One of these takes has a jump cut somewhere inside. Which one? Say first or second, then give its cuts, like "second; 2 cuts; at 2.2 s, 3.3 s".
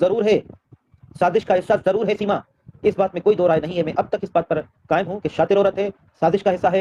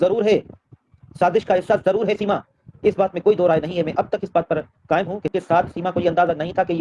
second; 1 cut; at 5.3 s